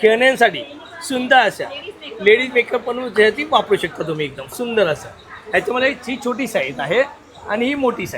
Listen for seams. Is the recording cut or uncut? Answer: uncut